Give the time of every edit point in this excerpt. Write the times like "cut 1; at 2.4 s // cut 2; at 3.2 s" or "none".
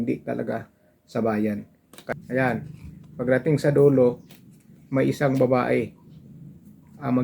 cut 1; at 2.1 s